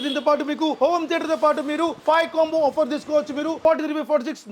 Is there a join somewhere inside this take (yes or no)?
yes